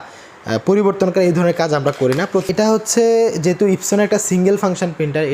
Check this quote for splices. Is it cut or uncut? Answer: cut